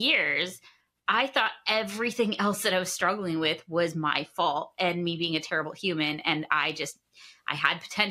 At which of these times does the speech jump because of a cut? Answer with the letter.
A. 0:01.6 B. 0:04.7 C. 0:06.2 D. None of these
D